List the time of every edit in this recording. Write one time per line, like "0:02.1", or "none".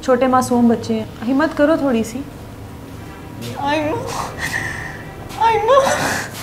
0:01.1